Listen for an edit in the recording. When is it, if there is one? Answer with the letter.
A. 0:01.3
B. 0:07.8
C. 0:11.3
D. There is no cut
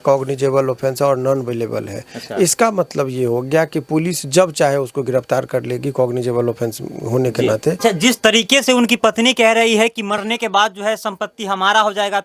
B